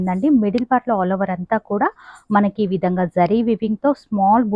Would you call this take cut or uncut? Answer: uncut